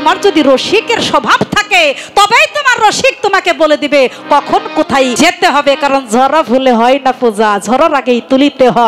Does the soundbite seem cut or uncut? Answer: cut